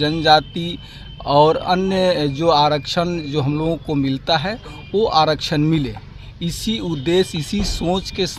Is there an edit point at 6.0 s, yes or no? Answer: no